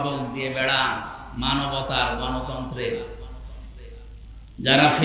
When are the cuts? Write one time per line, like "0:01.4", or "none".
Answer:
none

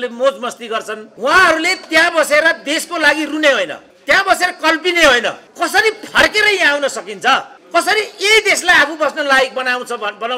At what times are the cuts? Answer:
0:01.0
0:03.9
0:05.4
0:07.6

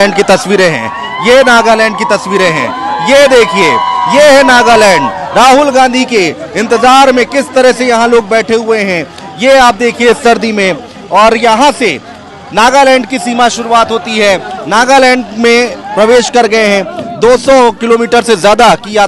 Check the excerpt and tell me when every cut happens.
none

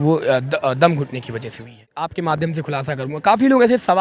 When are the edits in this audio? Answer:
0:02.1

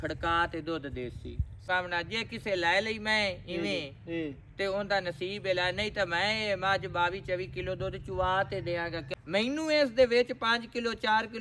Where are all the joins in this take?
0:01.6
0:09.0

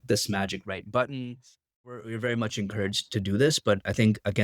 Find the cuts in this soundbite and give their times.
0:02.0

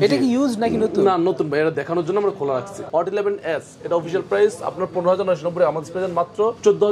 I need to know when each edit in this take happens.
0:02.9

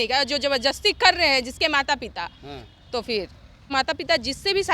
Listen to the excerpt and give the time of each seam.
0:03.6

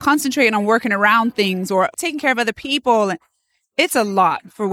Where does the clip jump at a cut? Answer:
none

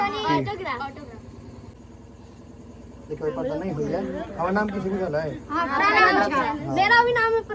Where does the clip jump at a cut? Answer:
0:01.8

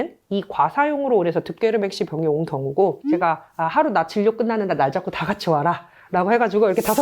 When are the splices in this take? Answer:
0:03.0

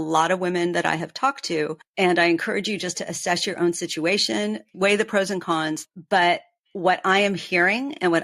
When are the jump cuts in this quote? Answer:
0:04.7
0:05.8

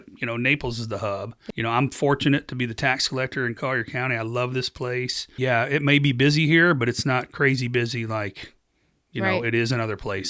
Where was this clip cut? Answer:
0:01.4
0:05.3

